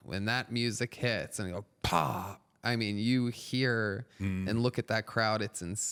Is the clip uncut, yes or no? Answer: yes